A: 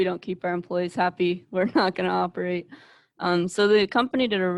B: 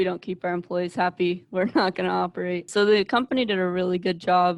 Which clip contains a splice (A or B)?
B